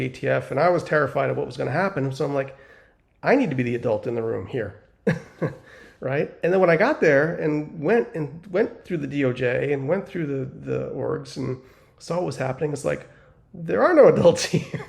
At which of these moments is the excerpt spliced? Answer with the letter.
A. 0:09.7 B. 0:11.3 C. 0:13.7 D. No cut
D